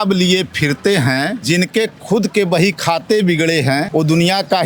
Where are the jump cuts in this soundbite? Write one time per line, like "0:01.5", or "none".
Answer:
0:01.4
0:03.9